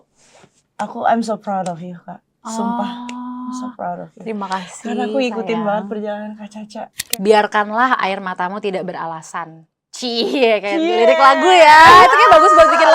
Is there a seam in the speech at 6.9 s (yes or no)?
yes